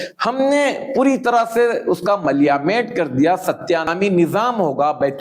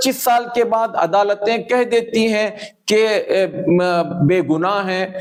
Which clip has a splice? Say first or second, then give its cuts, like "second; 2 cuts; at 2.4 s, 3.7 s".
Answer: first; 1 cut; at 3.9 s